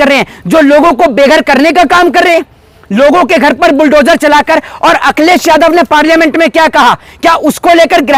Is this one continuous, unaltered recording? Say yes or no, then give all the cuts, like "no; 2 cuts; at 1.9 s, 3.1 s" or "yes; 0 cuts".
yes; 0 cuts